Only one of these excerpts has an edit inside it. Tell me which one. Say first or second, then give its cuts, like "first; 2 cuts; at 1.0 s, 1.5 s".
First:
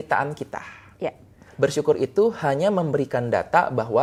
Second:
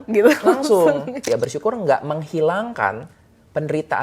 second; 1 cut; at 1.2 s